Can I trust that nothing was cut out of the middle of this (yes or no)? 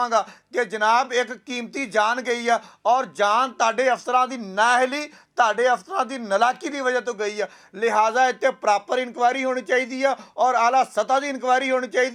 yes